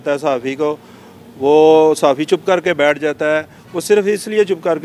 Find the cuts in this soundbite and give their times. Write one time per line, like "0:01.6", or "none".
none